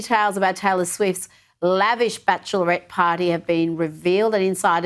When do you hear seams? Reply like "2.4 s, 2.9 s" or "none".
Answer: none